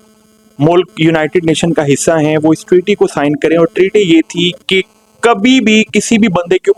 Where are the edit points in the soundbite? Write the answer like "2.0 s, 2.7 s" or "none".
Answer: none